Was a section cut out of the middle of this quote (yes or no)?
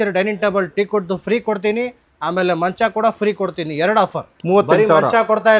yes